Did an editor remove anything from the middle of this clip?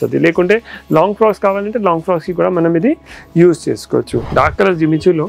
yes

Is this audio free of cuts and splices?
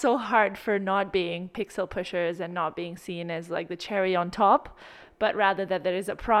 no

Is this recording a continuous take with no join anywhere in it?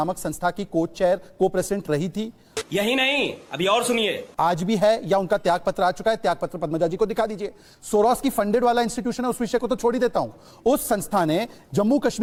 yes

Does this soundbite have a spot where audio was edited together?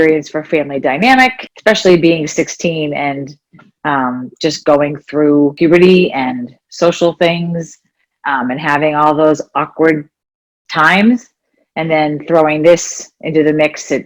yes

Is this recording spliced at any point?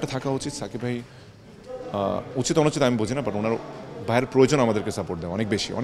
no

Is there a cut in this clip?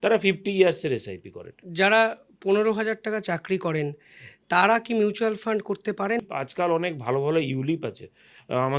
yes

